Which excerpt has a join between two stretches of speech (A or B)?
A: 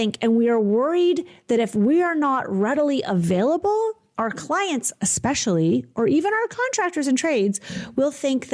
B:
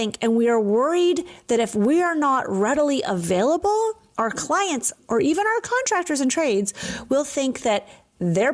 B